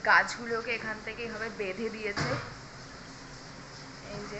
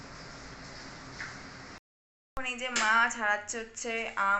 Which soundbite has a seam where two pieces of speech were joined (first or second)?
second